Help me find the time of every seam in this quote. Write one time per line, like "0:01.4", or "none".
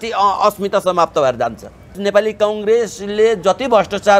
0:02.0